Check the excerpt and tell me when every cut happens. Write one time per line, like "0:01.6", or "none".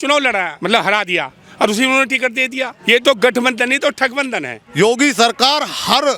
0:04.6